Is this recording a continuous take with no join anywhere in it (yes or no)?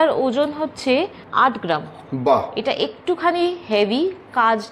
no